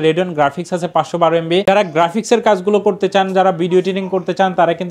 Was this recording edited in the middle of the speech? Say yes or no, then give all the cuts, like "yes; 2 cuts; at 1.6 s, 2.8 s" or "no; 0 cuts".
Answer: yes; 1 cut; at 1.6 s